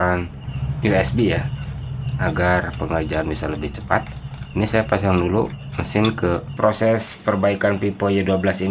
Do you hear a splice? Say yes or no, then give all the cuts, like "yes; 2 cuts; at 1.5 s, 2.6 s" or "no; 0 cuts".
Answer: yes; 1 cut; at 6.5 s